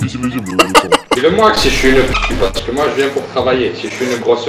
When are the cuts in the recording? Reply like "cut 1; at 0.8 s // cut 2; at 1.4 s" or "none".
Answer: cut 1; at 1.2 s